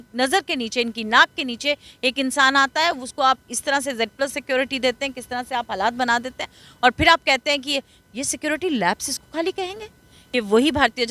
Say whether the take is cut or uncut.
cut